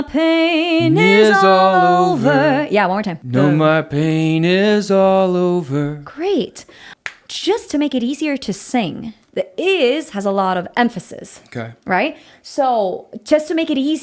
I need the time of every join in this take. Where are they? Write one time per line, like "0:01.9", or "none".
0:03.2
0:09.2